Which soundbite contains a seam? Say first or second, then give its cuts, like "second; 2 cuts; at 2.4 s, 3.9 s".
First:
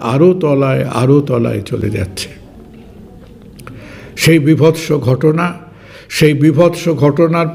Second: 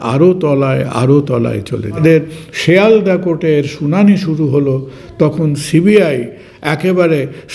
second; 1 cut; at 1.9 s